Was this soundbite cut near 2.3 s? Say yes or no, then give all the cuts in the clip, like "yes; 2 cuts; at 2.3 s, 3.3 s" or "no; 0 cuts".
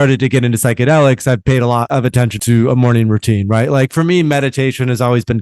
yes; 1 cut; at 2.3 s